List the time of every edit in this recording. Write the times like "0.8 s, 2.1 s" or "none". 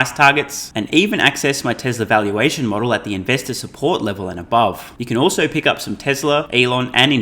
4.9 s, 6.5 s